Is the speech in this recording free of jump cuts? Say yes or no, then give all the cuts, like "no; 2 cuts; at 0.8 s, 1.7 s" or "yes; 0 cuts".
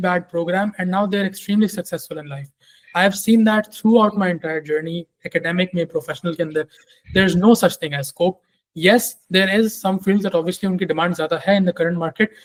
yes; 0 cuts